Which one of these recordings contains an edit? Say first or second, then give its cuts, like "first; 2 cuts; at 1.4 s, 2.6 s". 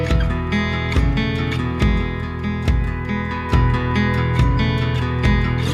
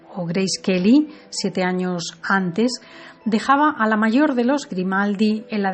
second; 1 cut; at 2.0 s